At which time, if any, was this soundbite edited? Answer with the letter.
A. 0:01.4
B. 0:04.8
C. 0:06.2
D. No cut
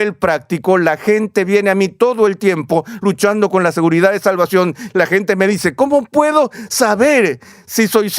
B